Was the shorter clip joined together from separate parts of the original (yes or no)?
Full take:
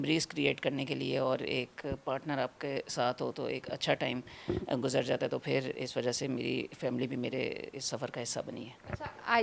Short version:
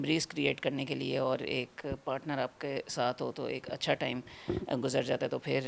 no